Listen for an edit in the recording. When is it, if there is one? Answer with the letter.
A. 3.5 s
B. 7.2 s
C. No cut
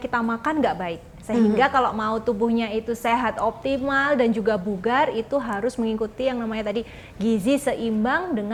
C